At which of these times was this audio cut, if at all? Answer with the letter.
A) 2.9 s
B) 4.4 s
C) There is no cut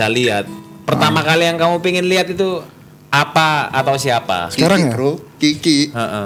C